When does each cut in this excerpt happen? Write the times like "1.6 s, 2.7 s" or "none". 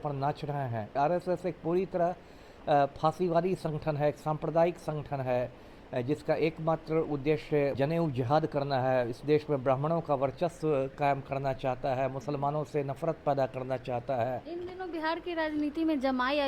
0.9 s, 7.8 s, 14.5 s